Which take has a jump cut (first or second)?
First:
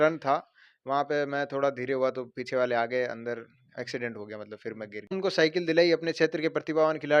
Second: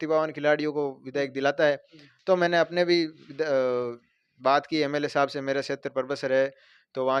first